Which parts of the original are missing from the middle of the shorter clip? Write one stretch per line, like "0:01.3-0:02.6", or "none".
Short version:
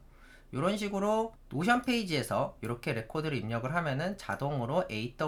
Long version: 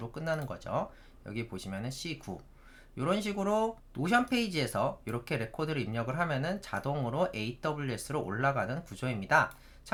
none